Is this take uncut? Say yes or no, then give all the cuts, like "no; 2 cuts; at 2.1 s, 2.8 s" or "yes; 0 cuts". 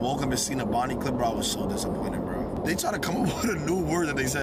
no; 1 cut; at 2.6 s